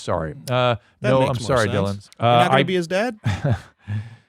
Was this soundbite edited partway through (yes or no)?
yes